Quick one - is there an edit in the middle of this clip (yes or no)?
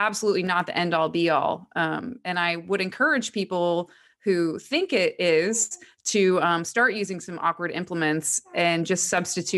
no